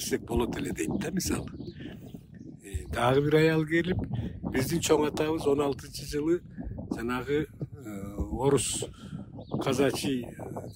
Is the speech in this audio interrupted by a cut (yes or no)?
no